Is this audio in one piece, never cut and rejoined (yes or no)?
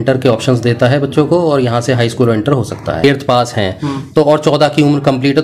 no